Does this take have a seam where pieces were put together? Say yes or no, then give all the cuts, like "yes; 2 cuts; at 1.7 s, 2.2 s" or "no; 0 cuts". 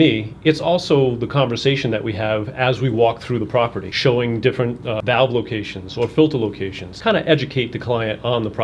yes; 3 cuts; at 3.8 s, 5.0 s, 6.9 s